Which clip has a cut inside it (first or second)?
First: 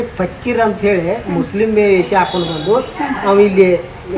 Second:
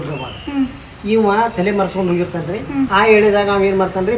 second